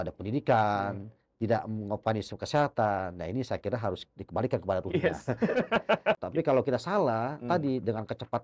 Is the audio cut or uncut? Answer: cut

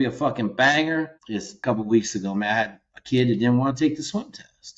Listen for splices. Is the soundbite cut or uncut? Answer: cut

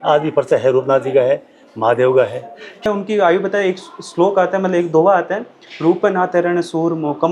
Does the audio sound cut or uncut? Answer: cut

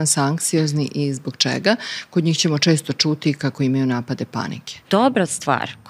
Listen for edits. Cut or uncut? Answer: cut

